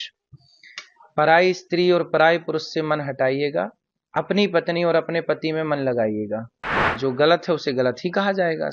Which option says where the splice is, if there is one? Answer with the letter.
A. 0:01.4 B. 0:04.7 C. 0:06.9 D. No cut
C